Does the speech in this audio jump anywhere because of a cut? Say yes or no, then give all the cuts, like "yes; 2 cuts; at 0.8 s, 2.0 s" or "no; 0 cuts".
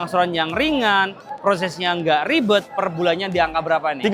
no; 0 cuts